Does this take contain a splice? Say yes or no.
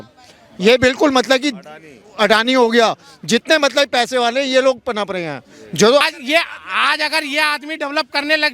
yes